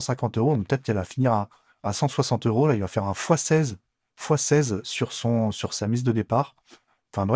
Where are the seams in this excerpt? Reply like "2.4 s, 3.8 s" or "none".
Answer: none

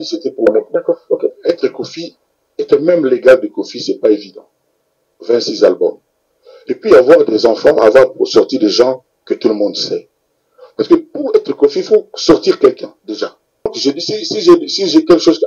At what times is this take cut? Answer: 13.8 s

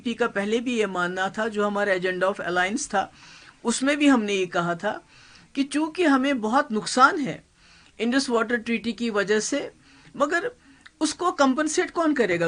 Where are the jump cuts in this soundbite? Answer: none

